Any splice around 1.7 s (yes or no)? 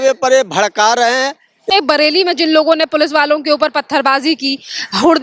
yes